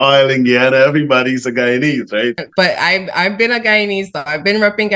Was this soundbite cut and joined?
yes; 1 cut; at 2.4 s

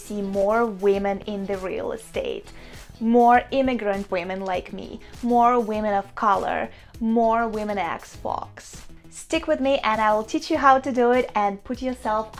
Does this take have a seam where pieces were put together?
no; 0 cuts

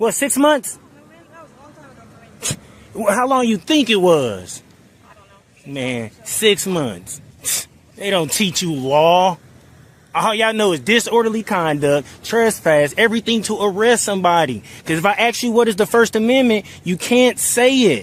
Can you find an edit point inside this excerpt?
no; 0 cuts

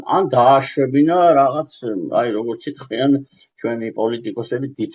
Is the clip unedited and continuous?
yes; 0 cuts

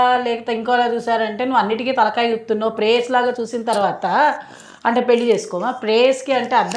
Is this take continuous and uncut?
yes; 0 cuts

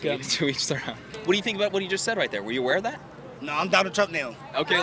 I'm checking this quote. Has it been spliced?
yes; 1 cut; at 1.1 s

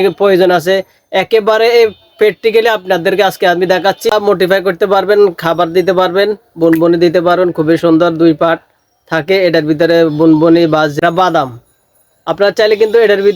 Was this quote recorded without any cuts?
no; 2 cuts; at 4.1 s, 10.9 s

